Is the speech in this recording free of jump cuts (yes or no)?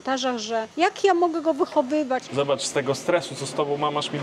no